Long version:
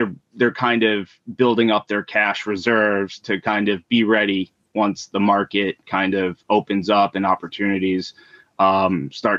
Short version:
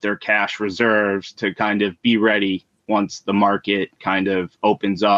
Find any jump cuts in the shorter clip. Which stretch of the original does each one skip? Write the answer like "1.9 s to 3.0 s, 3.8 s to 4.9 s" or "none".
none